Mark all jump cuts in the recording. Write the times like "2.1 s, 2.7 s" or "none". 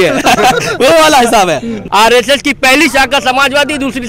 1.7 s